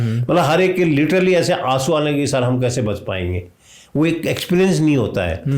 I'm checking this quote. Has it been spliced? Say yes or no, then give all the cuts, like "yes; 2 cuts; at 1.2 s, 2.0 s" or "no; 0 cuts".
no; 0 cuts